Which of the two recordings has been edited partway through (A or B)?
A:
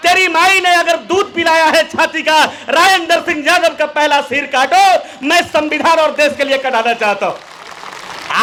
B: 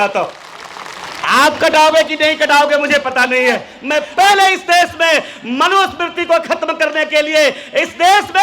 B